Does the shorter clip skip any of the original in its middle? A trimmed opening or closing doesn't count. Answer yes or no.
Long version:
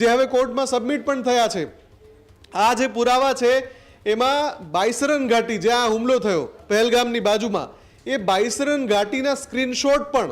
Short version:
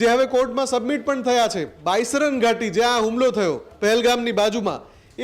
yes